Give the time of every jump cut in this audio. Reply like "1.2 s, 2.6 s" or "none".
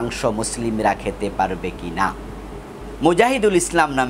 2.8 s